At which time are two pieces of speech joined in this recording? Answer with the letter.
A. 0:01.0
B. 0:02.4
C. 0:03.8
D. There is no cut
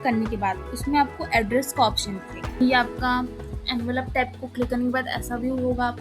B